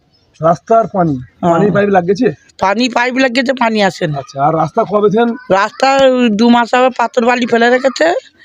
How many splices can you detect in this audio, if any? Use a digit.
0